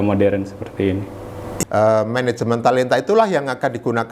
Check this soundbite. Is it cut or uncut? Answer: cut